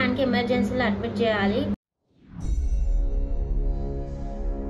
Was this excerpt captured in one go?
yes; 0 cuts

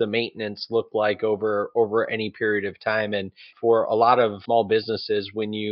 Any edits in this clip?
yes; 2 cuts; at 3.5 s, 4.4 s

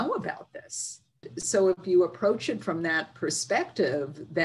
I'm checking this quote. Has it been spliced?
yes; 1 cut; at 1.3 s

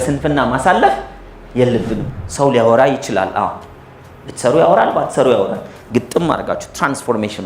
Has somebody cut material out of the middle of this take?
yes; 1 cut; at 2.0 s

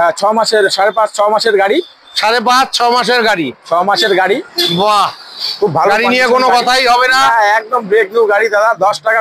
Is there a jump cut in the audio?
no; 0 cuts

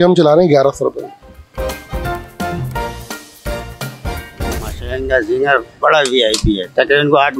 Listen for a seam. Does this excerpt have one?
yes; 2 cuts; at 1.8 s, 4.9 s

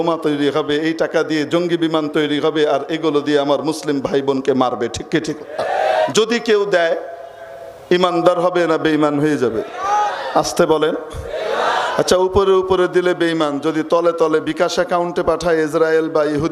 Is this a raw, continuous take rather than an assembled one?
no; 1 cut; at 6.1 s

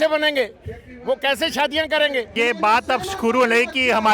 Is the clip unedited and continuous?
no; 1 cut; at 2.3 s

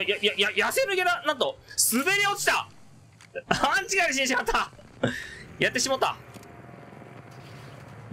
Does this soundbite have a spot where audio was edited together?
no; 0 cuts

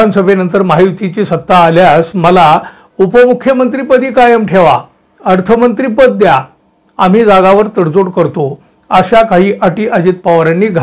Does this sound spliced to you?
no; 0 cuts

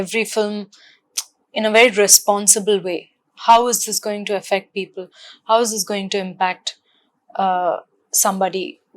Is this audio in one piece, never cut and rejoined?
yes; 0 cuts

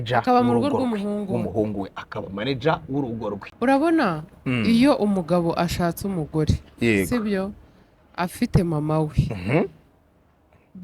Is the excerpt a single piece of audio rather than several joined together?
no; 1 cut; at 3.5 s

